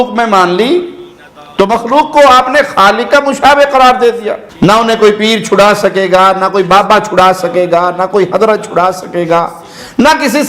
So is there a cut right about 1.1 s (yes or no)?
no